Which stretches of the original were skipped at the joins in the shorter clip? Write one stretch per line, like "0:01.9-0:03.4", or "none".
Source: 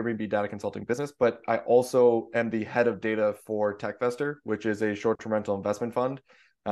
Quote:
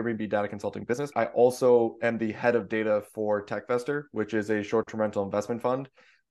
0:01.1-0:01.4